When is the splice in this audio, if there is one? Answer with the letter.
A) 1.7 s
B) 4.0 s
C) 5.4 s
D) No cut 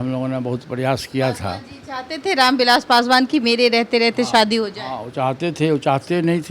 D